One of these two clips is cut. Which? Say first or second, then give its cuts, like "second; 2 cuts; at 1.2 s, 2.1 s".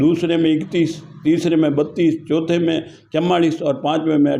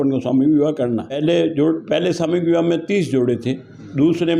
second; 1 cut; at 1.2 s